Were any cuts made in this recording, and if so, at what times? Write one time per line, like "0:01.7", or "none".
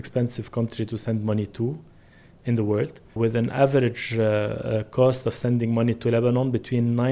0:03.2